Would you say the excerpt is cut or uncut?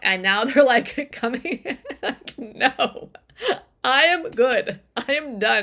uncut